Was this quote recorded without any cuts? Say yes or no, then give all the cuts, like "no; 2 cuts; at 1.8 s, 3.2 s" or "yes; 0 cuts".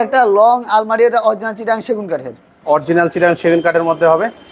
yes; 0 cuts